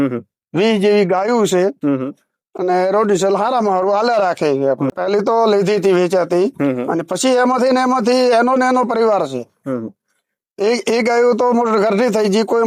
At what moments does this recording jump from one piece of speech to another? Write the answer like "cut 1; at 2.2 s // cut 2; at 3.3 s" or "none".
none